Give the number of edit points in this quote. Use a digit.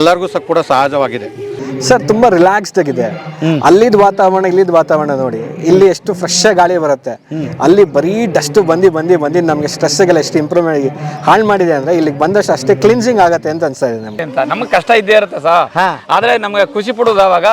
2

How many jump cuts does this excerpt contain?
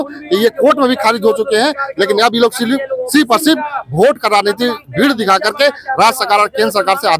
0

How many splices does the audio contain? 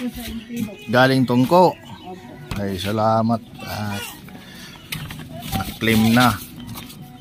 0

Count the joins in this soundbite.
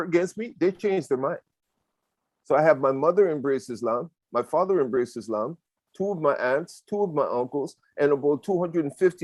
0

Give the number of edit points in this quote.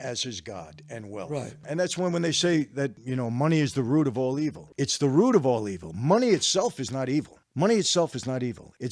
3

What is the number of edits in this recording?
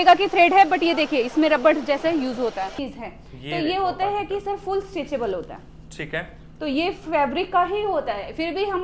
1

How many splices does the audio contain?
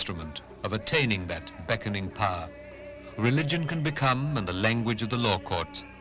0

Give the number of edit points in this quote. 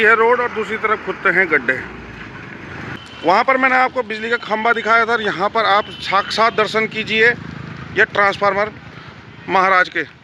1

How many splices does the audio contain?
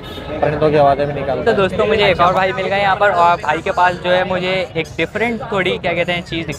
1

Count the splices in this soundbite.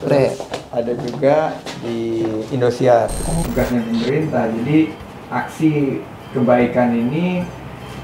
1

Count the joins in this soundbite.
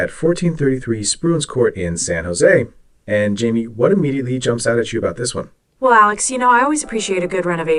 0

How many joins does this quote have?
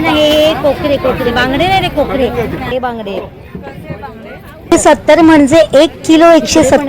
2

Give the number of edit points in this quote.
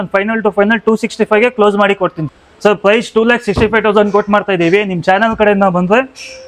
1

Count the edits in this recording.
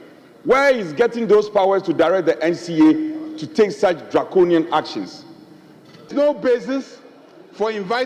1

